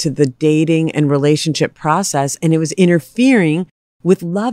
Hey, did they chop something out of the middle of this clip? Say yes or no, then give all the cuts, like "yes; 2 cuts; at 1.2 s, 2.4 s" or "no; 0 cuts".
no; 0 cuts